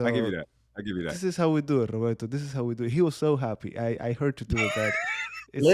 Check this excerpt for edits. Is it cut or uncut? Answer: uncut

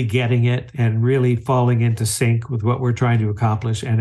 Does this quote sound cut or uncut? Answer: uncut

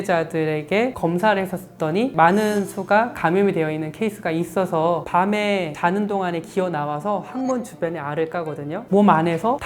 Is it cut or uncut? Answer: cut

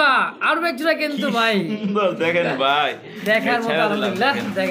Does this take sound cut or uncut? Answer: uncut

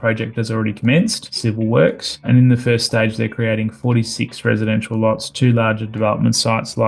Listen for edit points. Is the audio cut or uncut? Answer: cut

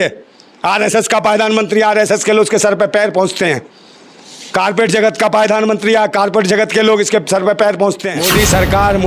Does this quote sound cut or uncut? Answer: cut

